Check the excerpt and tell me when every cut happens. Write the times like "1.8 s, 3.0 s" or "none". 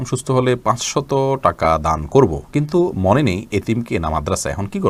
none